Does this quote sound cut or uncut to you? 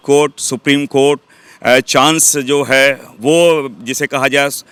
uncut